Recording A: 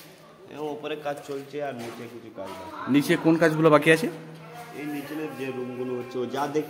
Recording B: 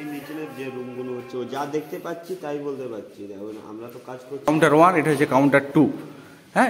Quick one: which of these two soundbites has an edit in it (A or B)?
B